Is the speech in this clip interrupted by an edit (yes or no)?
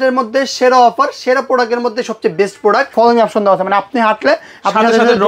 yes